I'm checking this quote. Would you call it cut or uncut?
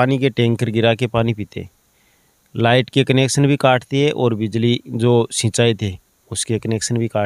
uncut